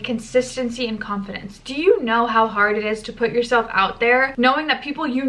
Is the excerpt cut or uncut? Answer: uncut